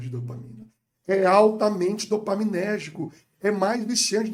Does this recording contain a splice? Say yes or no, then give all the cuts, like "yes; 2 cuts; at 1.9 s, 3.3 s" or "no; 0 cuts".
no; 0 cuts